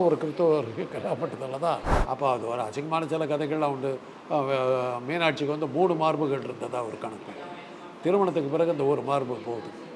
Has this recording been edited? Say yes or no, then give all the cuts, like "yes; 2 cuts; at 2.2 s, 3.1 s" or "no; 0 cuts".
yes; 1 cut; at 1.9 s